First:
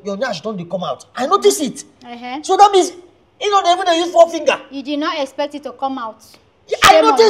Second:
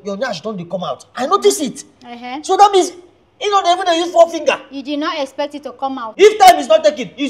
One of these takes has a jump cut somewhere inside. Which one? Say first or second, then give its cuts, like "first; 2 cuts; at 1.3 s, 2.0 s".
second; 1 cut; at 6.0 s